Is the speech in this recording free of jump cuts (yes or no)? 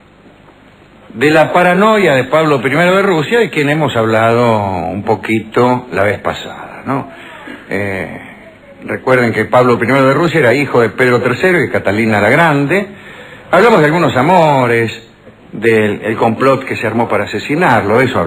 yes